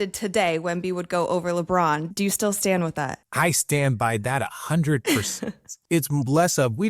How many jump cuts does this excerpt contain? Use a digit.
3